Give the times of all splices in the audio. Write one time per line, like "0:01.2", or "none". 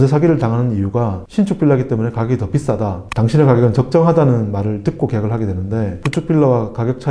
0:03.0
0:06.0

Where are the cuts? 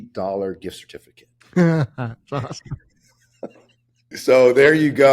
0:04.1

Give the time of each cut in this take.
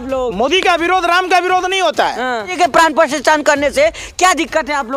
0:02.5

